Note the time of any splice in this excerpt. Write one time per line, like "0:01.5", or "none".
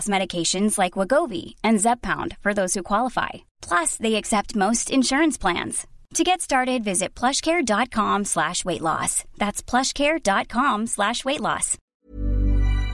0:11.7